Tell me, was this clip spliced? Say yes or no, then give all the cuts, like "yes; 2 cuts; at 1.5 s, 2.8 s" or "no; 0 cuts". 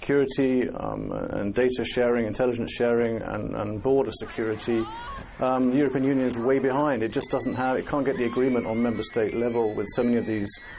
yes; 1 cut; at 1.2 s